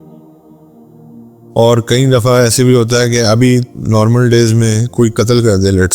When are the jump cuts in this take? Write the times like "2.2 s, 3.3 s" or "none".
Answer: 1.5 s